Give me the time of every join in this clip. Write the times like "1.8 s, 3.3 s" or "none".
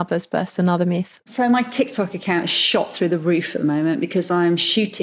1.1 s